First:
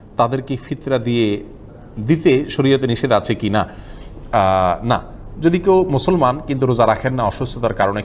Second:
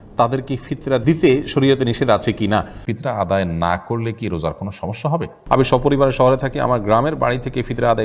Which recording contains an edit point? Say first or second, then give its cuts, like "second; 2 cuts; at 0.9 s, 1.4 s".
second; 3 cuts; at 1.0 s, 2.8 s, 5.3 s